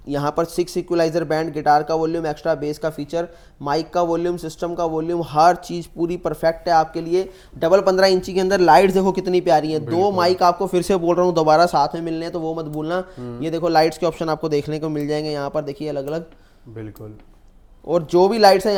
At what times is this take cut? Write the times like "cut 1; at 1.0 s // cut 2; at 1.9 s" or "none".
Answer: none